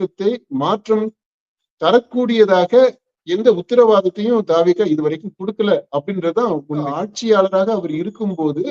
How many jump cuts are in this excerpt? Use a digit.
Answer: 1